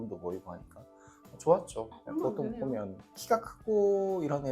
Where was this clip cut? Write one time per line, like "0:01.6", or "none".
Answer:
0:01.9